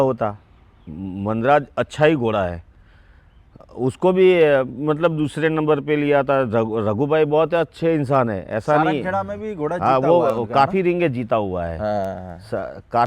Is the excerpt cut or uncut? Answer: uncut